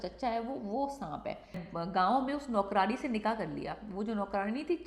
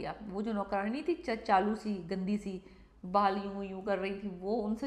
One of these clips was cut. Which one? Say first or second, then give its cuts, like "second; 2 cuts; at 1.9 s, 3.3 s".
first; 1 cut; at 1.6 s